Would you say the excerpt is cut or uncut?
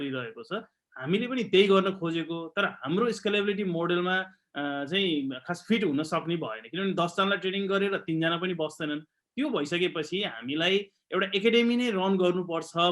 uncut